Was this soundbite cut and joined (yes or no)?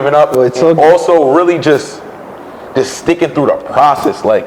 no